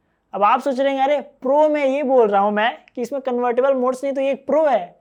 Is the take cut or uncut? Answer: uncut